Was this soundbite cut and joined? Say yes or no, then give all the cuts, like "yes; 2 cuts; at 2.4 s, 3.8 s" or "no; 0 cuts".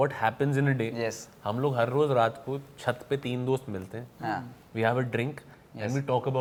no; 0 cuts